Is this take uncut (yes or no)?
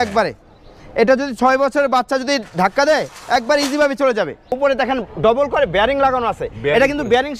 no